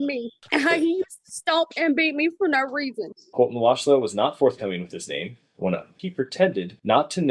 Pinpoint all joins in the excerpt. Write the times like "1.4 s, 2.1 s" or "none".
3.2 s, 5.9 s